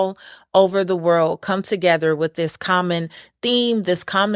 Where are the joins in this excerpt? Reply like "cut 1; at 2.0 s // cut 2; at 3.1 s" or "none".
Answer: none